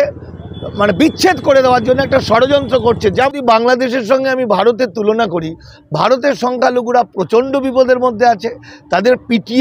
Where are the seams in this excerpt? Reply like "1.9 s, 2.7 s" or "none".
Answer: 3.3 s